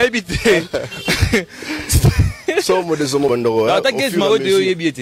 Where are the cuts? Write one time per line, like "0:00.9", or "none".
0:03.3